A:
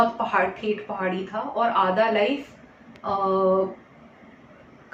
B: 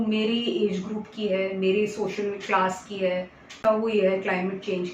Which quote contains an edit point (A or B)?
B